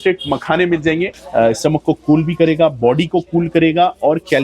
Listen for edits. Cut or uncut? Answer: cut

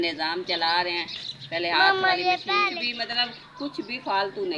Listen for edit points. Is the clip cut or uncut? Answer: cut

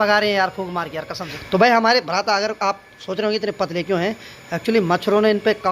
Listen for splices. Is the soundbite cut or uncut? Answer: cut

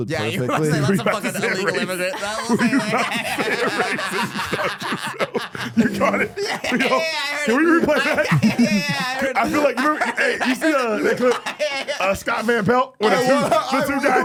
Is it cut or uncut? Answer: uncut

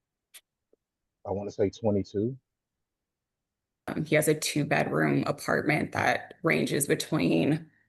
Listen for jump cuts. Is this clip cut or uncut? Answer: cut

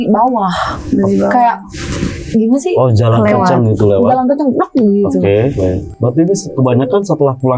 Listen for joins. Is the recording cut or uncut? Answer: uncut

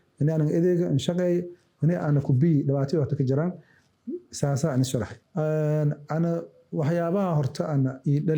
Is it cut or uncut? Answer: cut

